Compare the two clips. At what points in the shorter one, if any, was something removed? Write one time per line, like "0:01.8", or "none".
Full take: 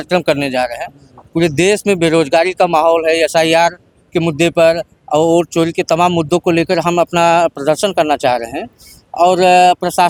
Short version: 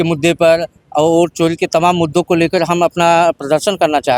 none